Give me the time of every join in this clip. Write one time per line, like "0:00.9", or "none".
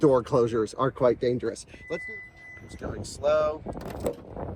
0:02.0